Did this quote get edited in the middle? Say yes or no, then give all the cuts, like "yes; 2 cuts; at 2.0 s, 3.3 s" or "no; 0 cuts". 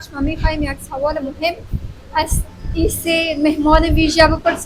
no; 0 cuts